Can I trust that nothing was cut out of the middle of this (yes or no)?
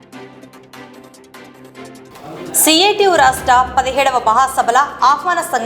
no